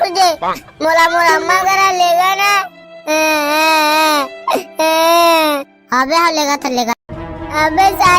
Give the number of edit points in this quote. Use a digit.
1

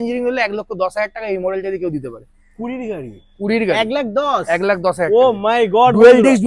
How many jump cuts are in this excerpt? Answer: 0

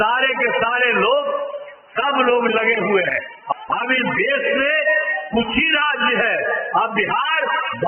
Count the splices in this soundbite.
1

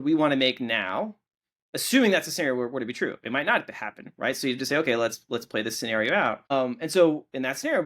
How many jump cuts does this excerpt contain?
1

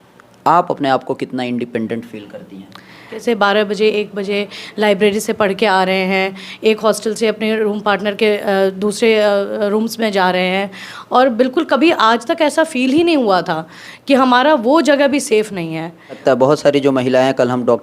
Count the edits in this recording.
2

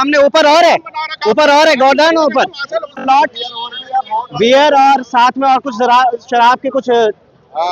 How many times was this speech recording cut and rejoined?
1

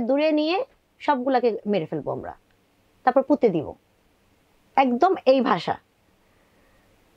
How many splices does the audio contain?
0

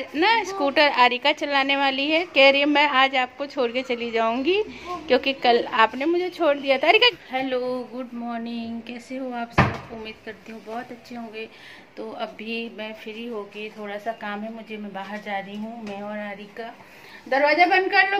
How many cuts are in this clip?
1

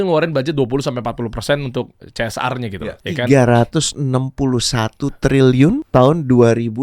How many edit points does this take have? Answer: 2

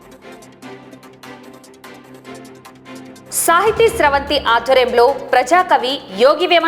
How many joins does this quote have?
0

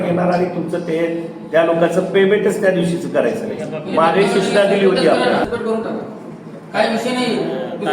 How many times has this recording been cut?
1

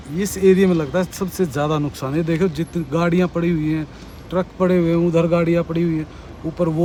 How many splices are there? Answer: 0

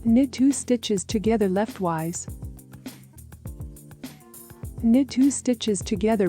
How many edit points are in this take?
2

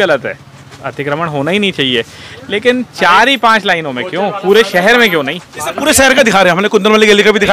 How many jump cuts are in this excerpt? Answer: 0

